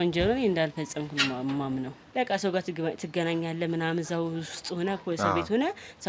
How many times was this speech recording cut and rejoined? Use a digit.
1